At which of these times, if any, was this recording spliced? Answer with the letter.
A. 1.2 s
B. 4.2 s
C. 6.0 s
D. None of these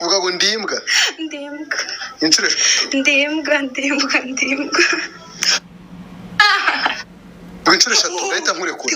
A